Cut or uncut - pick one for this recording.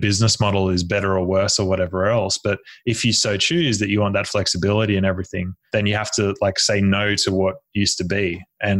cut